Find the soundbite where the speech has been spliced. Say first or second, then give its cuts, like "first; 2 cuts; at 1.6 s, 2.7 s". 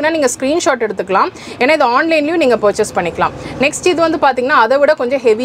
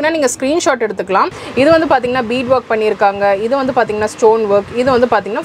second; 1 cut; at 1.4 s